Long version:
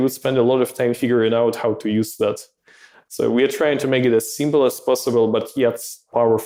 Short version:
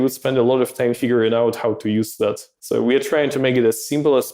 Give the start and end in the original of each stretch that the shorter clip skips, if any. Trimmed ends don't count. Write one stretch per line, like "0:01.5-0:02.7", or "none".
0:02.5-0:03.0